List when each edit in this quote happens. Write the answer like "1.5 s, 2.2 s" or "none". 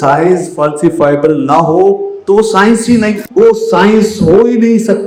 3.2 s